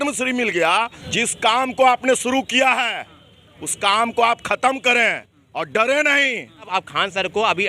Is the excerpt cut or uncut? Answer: cut